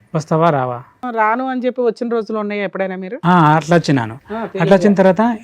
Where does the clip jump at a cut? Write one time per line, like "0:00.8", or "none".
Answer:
0:01.0